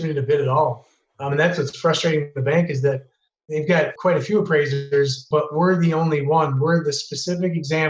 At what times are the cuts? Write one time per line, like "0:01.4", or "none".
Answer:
0:03.5
0:05.2